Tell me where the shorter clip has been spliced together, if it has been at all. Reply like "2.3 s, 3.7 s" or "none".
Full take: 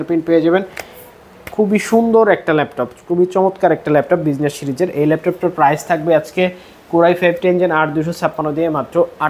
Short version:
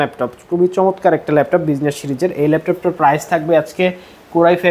none